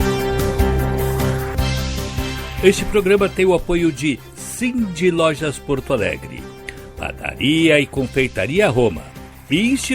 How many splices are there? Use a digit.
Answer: 2